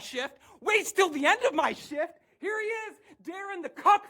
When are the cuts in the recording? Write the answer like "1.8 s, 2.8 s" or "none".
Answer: 2.3 s

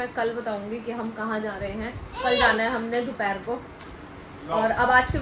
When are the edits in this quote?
none

